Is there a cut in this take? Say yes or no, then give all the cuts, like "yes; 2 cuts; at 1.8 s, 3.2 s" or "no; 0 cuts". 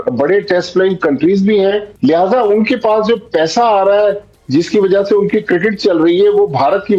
no; 0 cuts